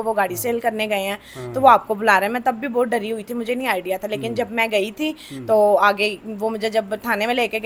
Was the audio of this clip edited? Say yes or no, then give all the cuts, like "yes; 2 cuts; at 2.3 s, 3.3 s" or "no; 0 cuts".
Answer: no; 0 cuts